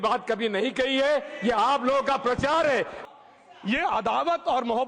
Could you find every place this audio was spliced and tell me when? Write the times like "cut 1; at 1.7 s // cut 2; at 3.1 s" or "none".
cut 1; at 3.0 s